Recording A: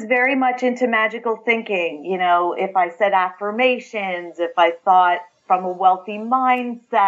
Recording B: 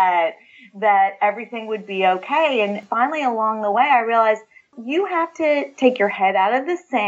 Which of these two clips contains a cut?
B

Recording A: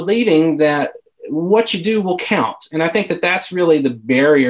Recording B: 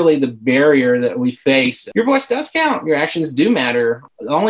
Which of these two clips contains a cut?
B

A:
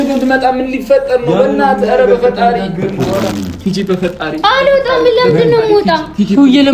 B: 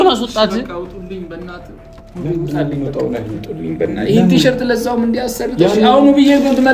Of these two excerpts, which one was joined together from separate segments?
A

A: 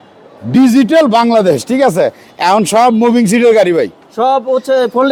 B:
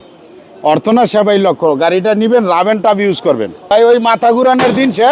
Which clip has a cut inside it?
B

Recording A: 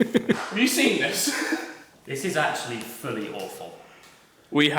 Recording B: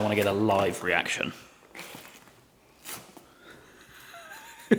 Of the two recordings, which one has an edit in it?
A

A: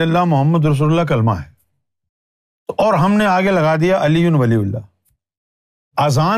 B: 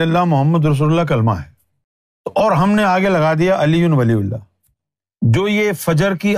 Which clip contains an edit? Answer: B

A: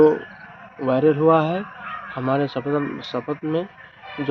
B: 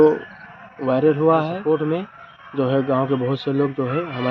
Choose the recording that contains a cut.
B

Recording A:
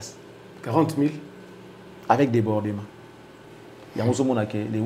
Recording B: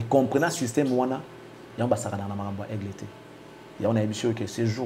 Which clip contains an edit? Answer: A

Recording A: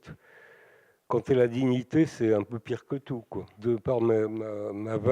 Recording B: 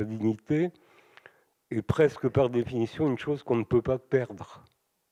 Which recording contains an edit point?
A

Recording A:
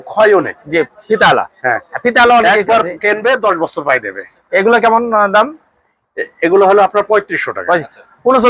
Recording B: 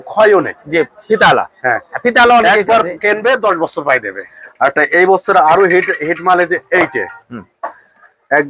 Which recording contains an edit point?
B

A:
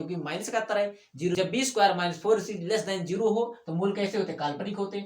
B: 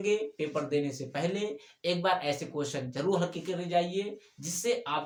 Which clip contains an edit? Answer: A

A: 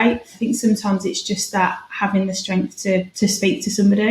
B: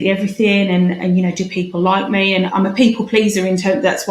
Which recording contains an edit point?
A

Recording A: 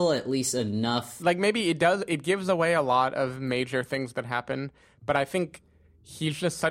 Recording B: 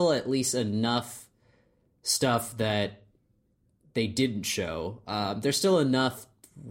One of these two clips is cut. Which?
A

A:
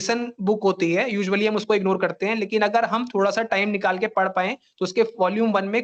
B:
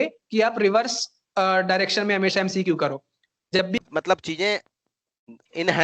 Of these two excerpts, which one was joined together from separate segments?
B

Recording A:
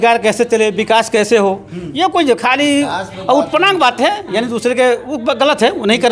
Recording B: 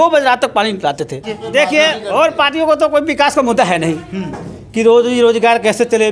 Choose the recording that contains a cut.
B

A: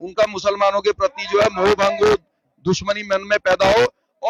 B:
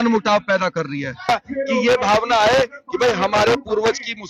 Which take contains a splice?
B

